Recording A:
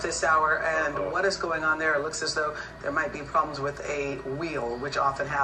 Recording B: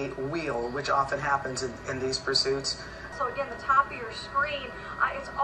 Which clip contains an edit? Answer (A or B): B